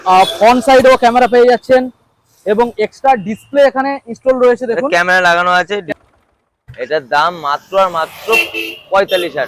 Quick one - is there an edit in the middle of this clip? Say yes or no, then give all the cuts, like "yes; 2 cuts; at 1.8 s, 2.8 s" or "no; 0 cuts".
yes; 1 cut; at 5.9 s